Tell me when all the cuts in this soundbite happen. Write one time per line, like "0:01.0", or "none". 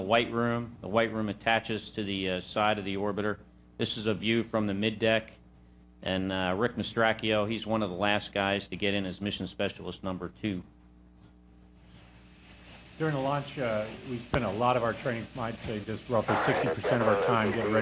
0:06.3